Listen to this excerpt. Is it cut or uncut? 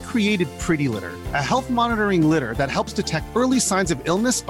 uncut